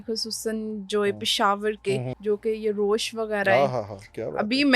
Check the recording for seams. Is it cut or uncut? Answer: cut